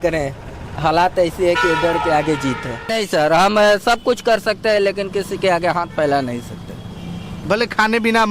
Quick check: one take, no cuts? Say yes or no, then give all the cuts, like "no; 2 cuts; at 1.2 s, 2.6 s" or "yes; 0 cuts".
no; 1 cut; at 2.9 s